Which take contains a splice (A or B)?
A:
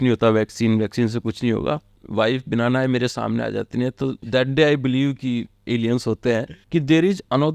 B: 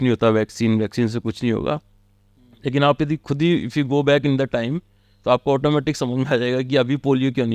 A